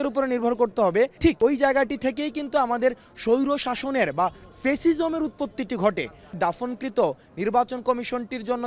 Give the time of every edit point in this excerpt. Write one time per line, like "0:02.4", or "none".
0:01.2
0:06.3

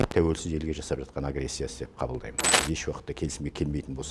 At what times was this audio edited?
0:02.6

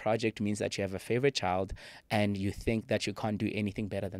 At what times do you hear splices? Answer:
none

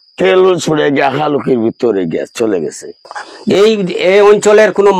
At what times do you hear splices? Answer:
0:03.4

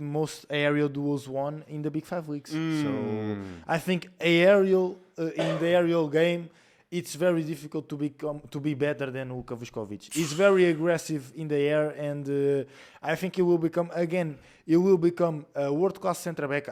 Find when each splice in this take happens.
none

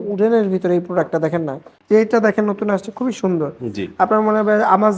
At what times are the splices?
0:01.7

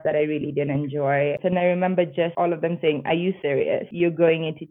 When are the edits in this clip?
0:01.4
0:02.3
0:03.5

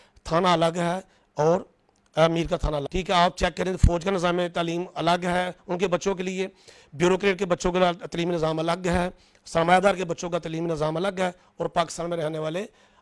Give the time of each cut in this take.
0:02.9

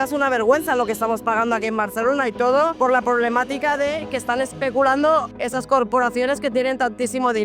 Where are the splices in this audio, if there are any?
0:02.7
0:05.4

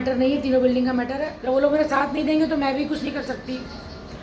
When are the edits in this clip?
0:01.1

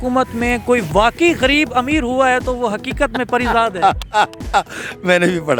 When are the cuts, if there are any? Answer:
none

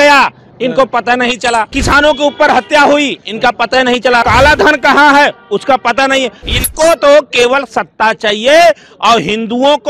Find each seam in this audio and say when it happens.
0:01.7
0:04.2
0:06.4

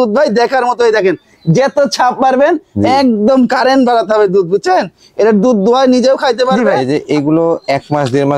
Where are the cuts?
0:06.6

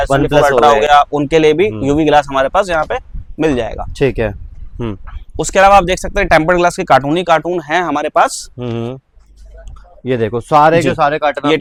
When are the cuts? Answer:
none

